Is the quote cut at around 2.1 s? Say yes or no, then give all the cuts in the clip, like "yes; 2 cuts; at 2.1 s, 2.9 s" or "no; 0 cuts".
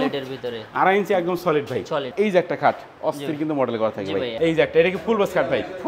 yes; 2 cuts; at 2.1 s, 4.3 s